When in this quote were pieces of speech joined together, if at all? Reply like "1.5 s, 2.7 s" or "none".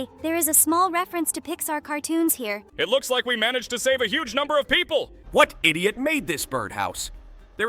2.6 s, 5.2 s